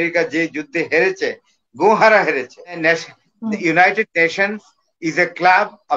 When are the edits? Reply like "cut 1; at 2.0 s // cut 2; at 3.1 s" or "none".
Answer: cut 1; at 2.6 s